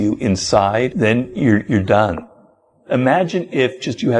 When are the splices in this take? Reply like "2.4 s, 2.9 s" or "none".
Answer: 0.9 s, 2.6 s